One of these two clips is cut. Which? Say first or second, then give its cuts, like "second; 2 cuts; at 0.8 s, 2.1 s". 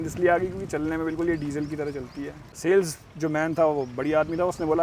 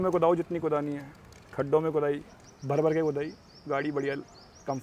first; 1 cut; at 2.5 s